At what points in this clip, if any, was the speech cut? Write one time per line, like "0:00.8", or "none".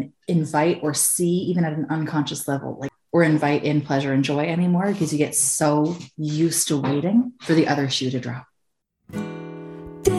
0:09.0

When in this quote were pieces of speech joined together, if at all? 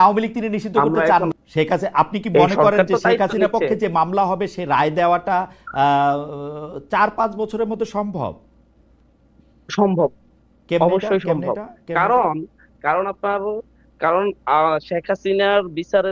0:01.4

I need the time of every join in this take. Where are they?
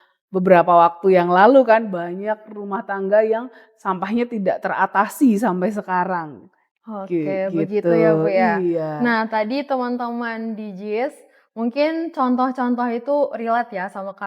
none

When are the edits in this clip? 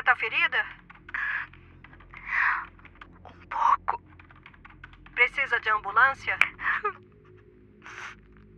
0:06.4

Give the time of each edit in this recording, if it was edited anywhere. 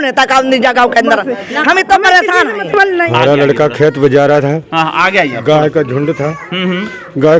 0:03.1

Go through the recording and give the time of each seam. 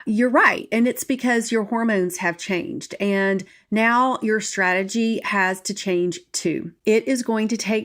0:06.7

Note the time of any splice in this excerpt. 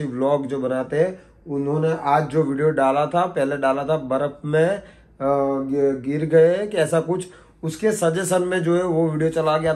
none

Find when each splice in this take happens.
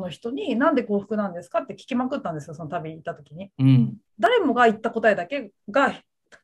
0:04.2

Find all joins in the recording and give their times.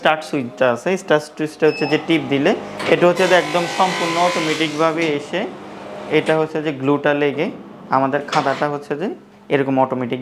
none

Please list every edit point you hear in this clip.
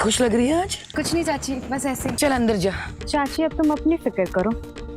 0:00.8
0:02.2
0:02.9

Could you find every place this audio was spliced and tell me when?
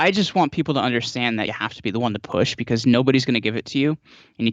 0:01.5

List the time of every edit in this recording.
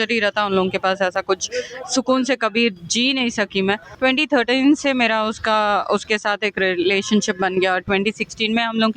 0:03.9

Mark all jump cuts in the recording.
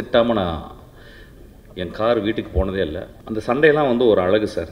0:03.1

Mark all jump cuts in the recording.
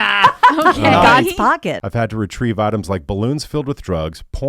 0:01.8

